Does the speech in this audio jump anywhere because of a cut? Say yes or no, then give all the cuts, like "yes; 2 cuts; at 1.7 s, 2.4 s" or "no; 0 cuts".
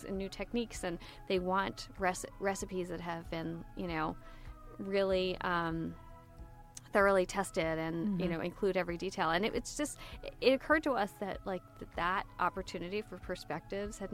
no; 0 cuts